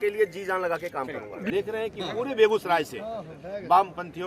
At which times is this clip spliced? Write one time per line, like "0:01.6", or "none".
0:01.5